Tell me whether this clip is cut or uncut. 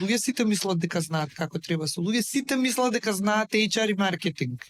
uncut